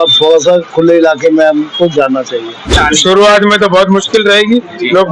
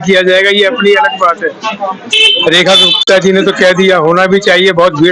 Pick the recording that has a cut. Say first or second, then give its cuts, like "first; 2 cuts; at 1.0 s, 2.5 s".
first; 1 cut; at 2.7 s